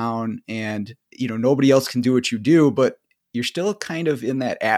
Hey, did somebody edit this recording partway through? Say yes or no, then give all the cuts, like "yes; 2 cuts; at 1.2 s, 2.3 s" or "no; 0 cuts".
yes; 1 cut; at 1.0 s